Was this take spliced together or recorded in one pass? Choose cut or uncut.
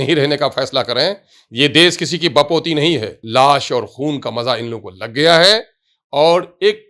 cut